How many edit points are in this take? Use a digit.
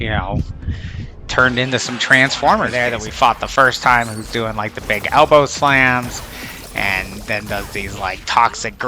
1